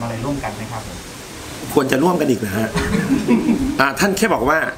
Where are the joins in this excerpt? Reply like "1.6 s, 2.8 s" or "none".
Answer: none